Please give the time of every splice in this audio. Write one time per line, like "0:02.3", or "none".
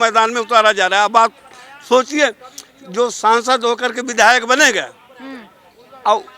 none